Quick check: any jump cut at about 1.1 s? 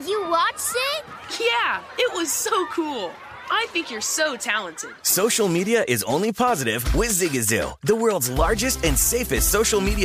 yes; 1 cut; at 1.1 s

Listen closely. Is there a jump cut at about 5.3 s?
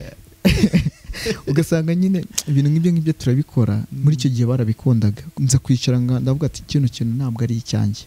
yes; 1 cut; at 5.3 s

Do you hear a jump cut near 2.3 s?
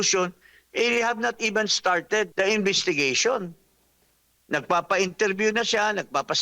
yes; 1 cut; at 2.3 s

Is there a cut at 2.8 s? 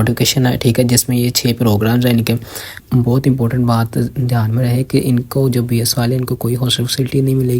yes; 1 cut; at 2.8 s

